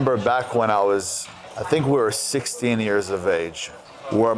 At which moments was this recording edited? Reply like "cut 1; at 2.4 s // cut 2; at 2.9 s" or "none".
none